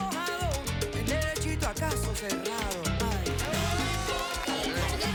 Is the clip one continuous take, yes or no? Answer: yes